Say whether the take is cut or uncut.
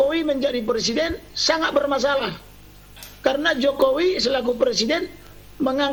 uncut